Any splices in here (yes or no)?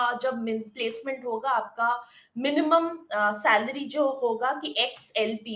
no